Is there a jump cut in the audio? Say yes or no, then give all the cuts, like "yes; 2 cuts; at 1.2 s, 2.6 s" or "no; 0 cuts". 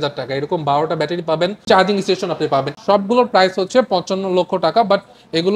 yes; 2 cuts; at 1.6 s, 2.7 s